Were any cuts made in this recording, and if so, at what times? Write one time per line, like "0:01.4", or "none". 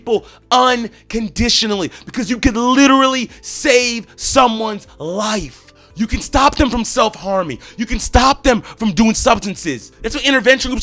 none